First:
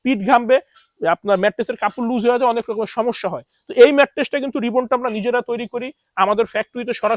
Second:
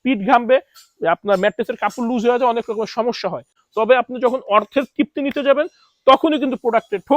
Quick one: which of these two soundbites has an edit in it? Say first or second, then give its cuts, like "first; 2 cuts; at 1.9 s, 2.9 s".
second; 1 cut; at 3.6 s